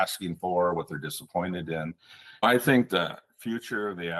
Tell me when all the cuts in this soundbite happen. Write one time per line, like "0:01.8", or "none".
0:02.4